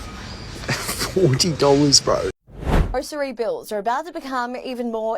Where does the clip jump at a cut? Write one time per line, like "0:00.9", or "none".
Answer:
0:02.9